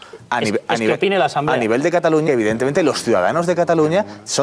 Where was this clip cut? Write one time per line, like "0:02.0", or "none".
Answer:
0:02.2